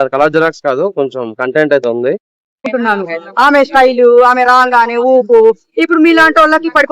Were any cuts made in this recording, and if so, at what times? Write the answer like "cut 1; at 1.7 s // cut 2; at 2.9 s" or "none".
cut 1; at 2.6 s

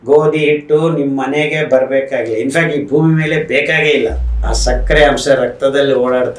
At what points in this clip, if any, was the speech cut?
cut 1; at 4.3 s

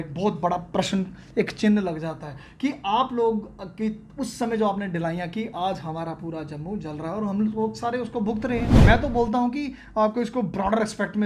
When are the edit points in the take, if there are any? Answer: cut 1; at 8.7 s

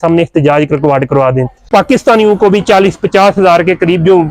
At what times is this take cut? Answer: cut 1; at 1.7 s

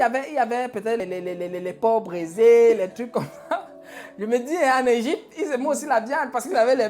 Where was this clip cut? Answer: cut 1; at 1.0 s

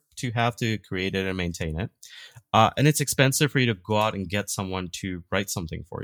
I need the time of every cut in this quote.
none

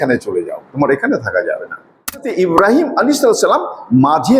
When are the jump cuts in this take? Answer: cut 1; at 2.3 s

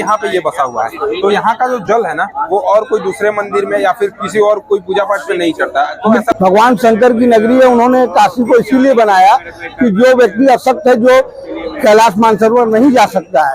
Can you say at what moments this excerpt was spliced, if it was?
cut 1; at 6.3 s

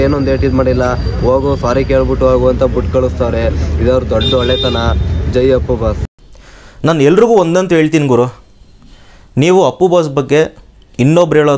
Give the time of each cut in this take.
cut 1; at 6.1 s

